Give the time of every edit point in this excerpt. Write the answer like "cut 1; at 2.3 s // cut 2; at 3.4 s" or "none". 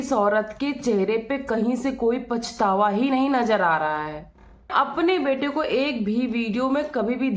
cut 1; at 4.7 s

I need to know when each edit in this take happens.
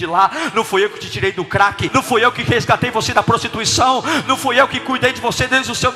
cut 1; at 1.9 s

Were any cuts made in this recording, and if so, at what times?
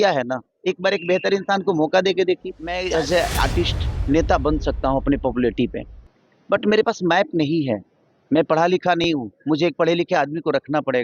cut 1; at 2.7 s

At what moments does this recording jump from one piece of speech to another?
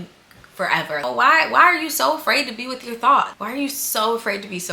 cut 1; at 1.0 s // cut 2; at 3.4 s

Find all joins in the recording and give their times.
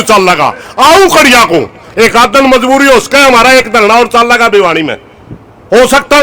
none

